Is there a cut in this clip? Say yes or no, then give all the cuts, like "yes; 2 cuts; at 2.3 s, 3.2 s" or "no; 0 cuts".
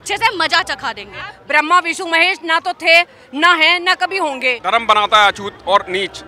yes; 2 cuts; at 1.3 s, 4.6 s